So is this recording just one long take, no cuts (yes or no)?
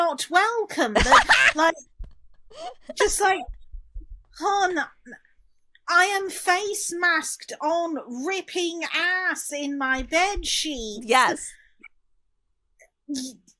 yes